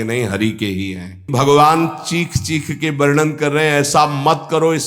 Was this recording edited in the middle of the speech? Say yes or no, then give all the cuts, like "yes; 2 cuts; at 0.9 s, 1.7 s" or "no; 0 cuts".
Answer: yes; 1 cut; at 1.3 s